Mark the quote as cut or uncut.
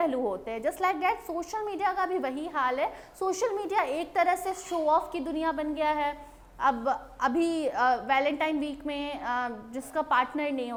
uncut